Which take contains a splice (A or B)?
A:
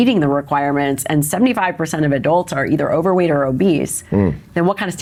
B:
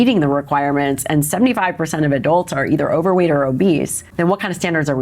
B